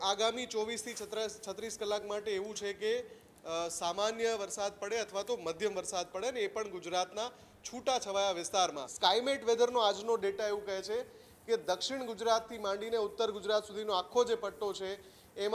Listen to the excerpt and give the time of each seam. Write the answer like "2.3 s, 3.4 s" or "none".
8.9 s